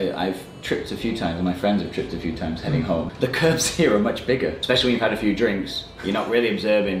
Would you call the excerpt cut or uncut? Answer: cut